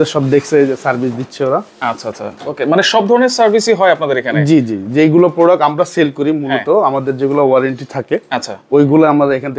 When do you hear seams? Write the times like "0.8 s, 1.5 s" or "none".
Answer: none

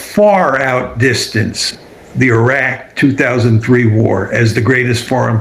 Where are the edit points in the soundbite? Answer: none

